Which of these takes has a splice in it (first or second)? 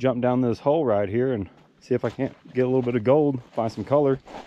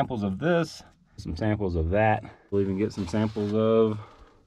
second